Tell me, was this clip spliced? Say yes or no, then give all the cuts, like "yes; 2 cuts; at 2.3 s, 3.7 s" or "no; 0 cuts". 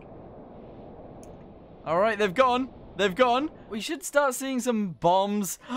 yes; 1 cut; at 3.8 s